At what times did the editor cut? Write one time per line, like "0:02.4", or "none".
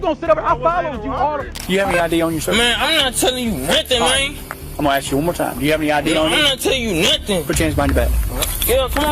0:01.6